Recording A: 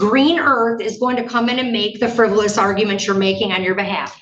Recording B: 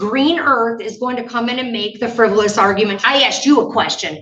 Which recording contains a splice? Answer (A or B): B